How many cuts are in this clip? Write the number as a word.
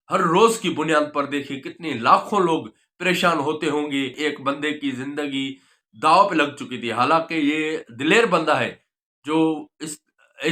one